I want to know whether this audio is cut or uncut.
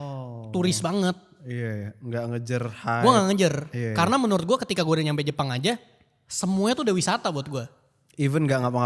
uncut